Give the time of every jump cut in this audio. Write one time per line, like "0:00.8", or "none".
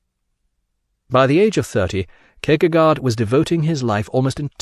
0:03.2